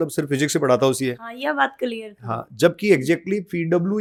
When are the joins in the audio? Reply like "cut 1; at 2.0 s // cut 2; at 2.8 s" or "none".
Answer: none